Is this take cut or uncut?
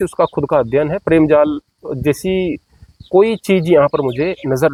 uncut